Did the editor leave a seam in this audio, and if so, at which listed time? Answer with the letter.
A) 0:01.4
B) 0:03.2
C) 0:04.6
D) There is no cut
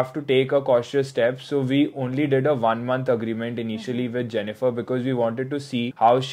D